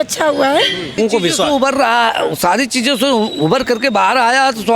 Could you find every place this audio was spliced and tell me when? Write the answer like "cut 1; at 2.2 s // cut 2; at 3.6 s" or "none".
cut 1; at 1.0 s